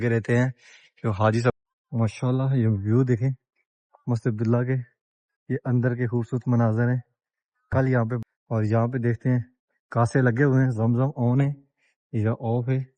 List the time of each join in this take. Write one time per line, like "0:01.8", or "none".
0:01.5
0:08.2